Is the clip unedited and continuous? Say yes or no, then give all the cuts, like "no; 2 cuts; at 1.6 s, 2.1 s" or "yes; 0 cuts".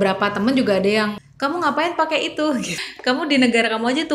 no; 2 cuts; at 1.2 s, 2.8 s